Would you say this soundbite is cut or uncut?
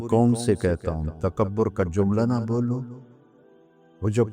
uncut